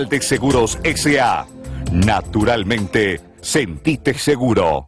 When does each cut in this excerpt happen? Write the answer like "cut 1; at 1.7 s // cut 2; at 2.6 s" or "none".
none